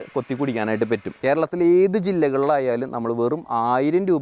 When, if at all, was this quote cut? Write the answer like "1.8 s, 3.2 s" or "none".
1.1 s